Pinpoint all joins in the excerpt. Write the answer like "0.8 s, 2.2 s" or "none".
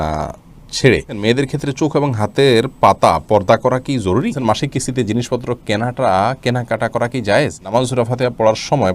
1.2 s, 4.4 s, 7.7 s